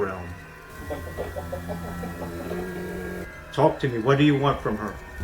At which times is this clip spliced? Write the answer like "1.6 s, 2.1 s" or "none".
3.3 s